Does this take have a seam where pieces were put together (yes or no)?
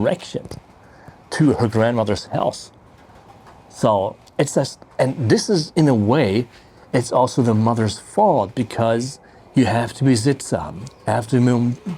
no